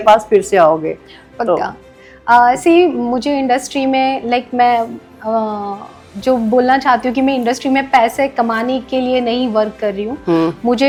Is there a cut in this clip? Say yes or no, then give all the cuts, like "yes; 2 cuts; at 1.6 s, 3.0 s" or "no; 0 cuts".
no; 0 cuts